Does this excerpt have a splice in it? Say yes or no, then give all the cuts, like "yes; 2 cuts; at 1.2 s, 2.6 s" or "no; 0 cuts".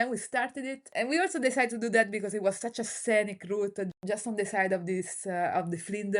yes; 2 cuts; at 0.8 s, 3.9 s